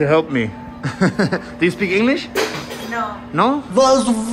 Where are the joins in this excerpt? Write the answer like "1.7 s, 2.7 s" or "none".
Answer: none